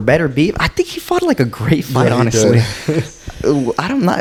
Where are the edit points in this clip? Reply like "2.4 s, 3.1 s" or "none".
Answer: none